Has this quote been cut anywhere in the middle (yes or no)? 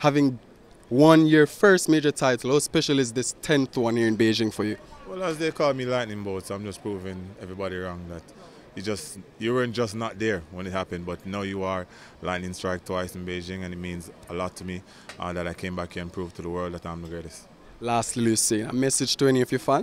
no